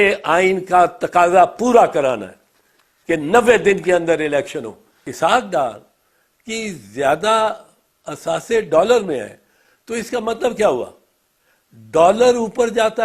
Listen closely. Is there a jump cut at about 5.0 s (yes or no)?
yes